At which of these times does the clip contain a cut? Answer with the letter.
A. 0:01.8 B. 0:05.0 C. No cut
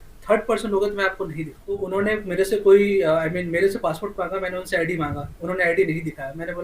A